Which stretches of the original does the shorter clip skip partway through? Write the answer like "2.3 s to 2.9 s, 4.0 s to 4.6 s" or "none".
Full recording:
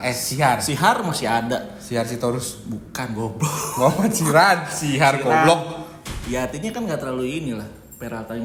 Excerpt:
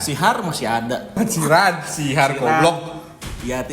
1.7 s to 4.0 s